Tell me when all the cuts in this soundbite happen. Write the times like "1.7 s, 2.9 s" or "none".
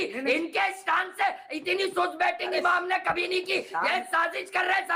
none